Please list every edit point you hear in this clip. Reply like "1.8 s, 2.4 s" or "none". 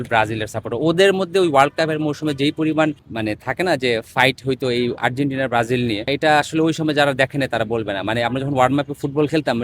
3.1 s, 6.1 s